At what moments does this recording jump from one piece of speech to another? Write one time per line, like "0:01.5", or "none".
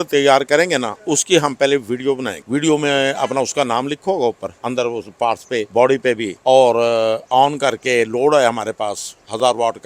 0:02.3
0:04.5
0:05.7
0:06.3